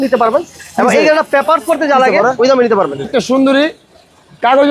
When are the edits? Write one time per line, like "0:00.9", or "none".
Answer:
none